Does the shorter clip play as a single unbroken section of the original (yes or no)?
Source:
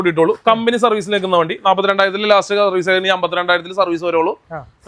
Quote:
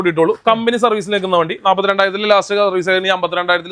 yes